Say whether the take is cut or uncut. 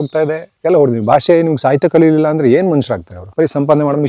cut